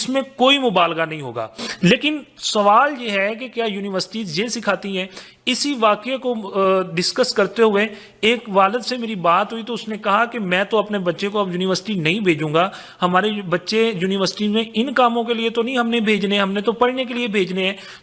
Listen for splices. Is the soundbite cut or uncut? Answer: uncut